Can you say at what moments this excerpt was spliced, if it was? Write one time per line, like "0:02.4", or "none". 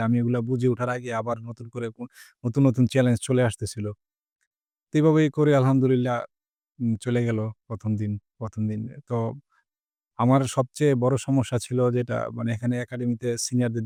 none